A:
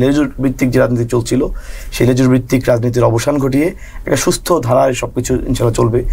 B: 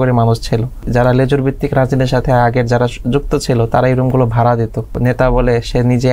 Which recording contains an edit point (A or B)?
B